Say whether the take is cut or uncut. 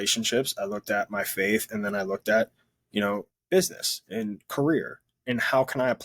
cut